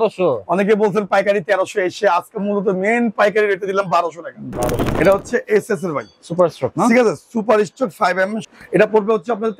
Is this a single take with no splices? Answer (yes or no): no